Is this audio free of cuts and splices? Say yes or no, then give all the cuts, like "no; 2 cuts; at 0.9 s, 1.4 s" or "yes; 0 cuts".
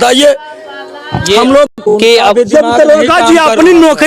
no; 1 cut; at 1.8 s